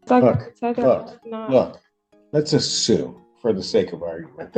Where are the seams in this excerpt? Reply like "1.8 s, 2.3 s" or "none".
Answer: none